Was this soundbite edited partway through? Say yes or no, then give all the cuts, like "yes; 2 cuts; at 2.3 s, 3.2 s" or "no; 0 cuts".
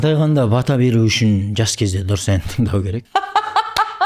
yes; 1 cut; at 3.0 s